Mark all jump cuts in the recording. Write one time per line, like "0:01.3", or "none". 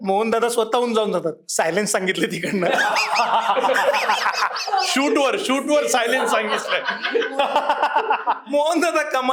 none